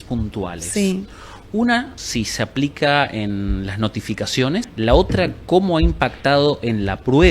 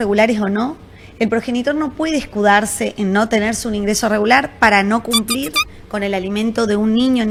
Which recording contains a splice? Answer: first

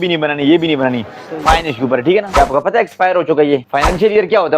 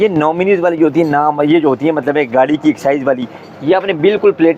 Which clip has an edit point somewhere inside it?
first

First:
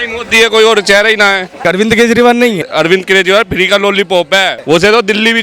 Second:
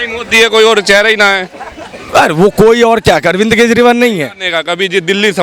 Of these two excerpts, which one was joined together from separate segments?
first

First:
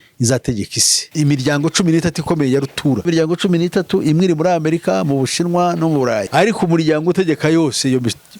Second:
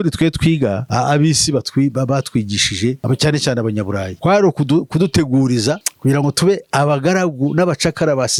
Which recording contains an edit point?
first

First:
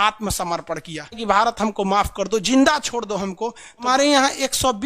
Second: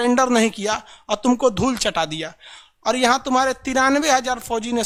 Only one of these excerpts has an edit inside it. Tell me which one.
first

